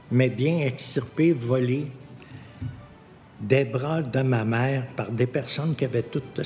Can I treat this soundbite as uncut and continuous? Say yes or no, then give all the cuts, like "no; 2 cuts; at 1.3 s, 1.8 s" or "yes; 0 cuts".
yes; 0 cuts